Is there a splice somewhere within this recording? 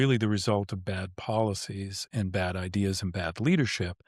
no; 0 cuts

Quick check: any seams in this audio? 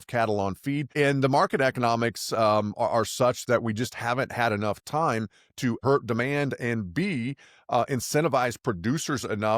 yes; 2 cuts; at 0.9 s, 5.8 s

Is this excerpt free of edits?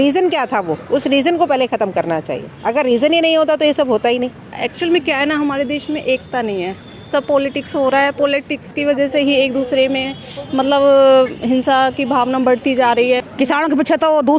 no; 2 cuts; at 4.6 s, 13.3 s

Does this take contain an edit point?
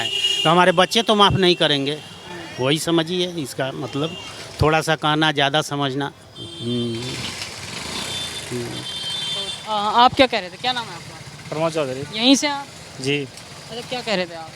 no; 0 cuts

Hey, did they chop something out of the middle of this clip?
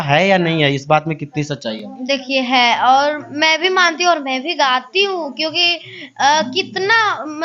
no; 0 cuts

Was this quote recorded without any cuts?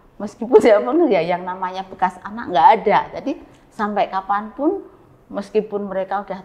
yes; 0 cuts

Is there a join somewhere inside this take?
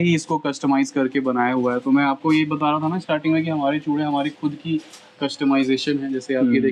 no; 0 cuts

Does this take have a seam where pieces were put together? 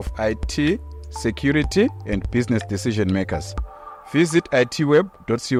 no; 0 cuts

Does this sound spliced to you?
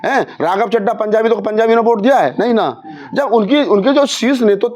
no; 0 cuts

